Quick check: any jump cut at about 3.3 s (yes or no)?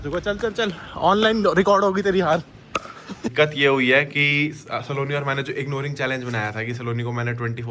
yes